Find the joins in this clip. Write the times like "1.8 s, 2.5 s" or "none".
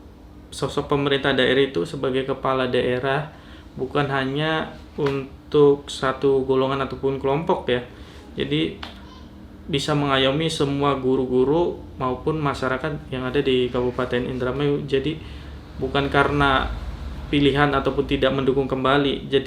none